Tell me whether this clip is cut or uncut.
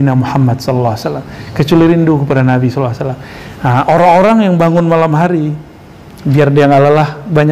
uncut